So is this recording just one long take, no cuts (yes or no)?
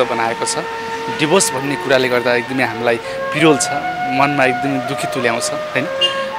yes